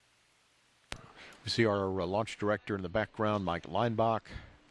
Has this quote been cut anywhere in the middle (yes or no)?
no